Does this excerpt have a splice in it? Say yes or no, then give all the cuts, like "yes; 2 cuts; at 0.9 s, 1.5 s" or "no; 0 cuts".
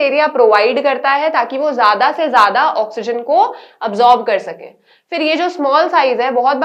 no; 0 cuts